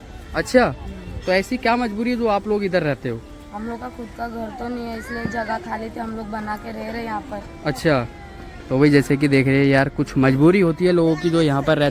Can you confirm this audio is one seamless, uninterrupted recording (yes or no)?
yes